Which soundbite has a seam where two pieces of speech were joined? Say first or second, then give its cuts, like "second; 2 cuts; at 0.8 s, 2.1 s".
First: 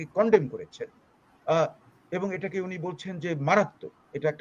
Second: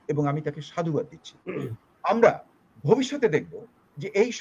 second; 1 cut; at 1.5 s